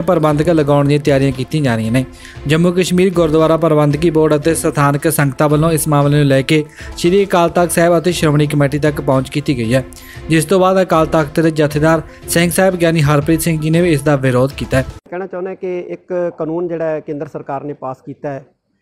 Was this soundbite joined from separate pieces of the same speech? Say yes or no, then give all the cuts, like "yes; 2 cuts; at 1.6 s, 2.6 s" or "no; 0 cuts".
no; 0 cuts